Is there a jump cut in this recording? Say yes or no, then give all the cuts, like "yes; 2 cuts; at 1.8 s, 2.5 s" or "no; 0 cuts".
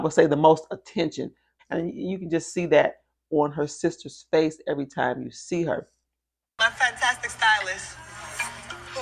yes; 1 cut; at 1.5 s